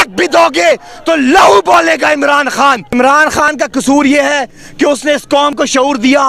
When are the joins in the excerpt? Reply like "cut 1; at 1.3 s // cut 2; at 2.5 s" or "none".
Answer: cut 1; at 3.0 s